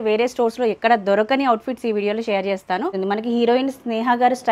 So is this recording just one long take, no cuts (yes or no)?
no